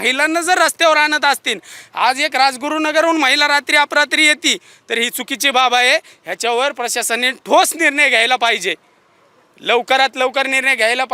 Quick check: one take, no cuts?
yes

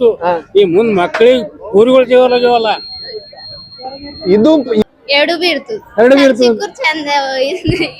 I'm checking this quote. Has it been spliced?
yes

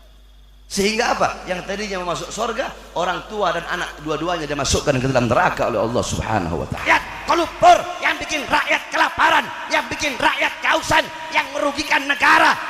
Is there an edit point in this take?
yes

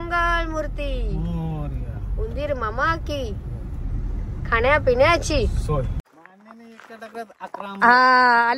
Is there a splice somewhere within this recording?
yes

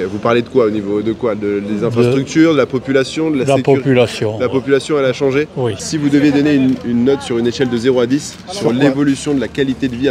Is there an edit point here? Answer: yes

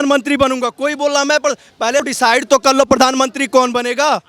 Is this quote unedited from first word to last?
no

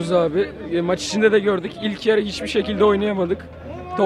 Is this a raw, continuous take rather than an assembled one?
yes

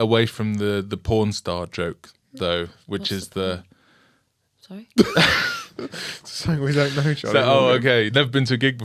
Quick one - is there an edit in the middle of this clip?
no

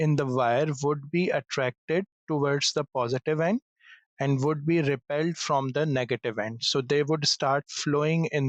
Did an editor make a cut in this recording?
no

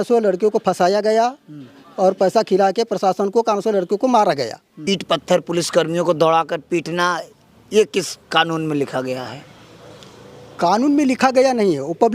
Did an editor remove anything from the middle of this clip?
yes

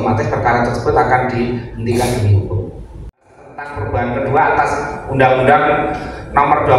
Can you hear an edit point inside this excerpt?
yes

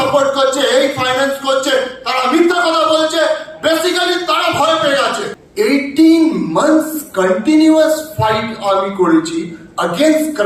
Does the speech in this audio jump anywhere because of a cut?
yes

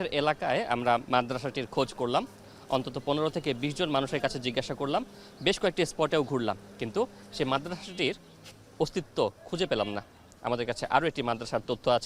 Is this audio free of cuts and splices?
yes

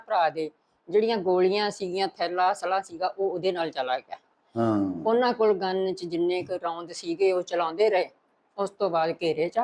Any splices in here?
no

